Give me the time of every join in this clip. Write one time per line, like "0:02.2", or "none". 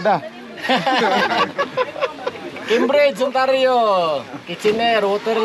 none